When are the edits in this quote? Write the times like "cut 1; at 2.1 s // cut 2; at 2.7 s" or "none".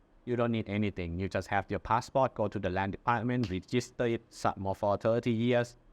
none